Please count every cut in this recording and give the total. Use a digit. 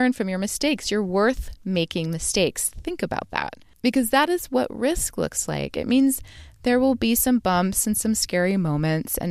1